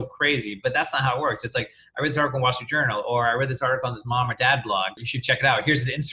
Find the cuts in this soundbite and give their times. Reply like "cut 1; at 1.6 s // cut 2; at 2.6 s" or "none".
cut 1; at 5.1 s